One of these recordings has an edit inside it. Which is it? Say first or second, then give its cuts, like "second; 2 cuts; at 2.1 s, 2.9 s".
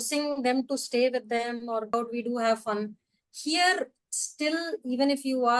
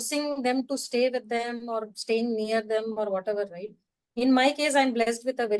first; 1 cut; at 1.9 s